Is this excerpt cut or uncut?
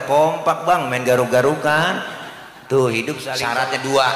cut